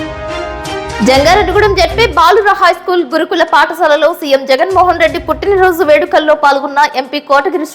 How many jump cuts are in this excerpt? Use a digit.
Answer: 1